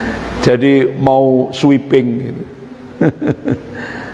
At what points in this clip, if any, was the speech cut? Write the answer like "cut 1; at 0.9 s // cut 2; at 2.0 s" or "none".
none